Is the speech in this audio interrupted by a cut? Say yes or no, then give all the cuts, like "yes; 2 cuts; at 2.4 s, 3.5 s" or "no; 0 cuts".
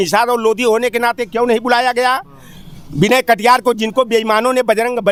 no; 0 cuts